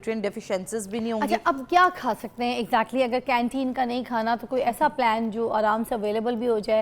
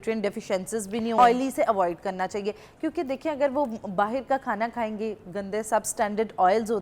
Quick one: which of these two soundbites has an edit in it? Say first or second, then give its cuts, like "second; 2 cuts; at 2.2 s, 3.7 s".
second; 1 cut; at 1.1 s